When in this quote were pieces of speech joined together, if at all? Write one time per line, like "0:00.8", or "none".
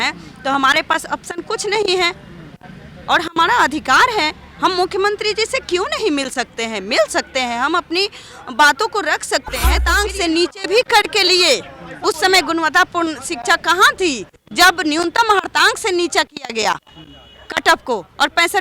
0:09.9